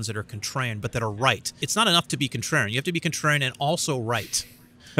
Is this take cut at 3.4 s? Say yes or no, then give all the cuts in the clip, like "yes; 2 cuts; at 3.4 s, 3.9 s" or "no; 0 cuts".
no; 1 cut; at 1.6 s